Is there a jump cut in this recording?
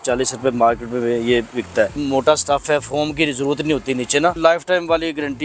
yes; 2 cuts; at 2.0 s, 4.4 s

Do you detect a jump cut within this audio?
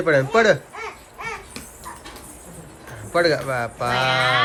no; 0 cuts

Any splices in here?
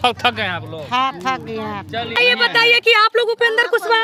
yes; 1 cut; at 2.2 s

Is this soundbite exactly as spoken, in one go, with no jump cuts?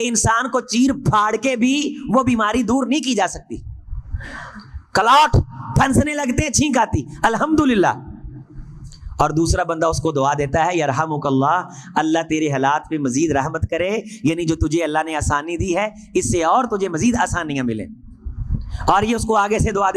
yes; 0 cuts

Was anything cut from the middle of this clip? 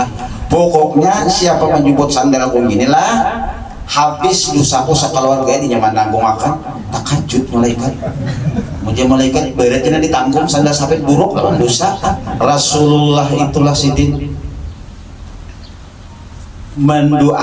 yes; 1 cut; at 12.4 s

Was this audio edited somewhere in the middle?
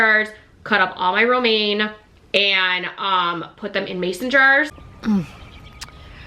yes; 1 cut; at 4.9 s

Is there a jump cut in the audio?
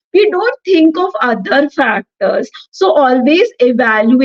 no; 0 cuts

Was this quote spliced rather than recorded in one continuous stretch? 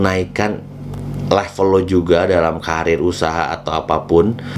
no; 0 cuts

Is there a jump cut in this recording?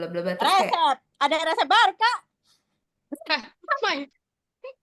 no; 0 cuts

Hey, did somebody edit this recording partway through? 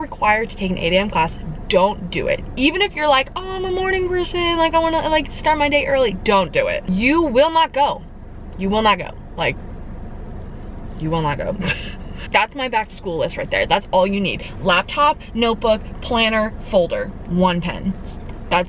yes; 1 cut; at 12.3 s

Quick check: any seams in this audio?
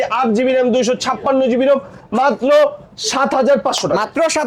no; 0 cuts

